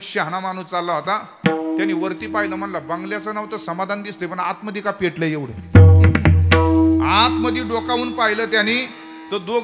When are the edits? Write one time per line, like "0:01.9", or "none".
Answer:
none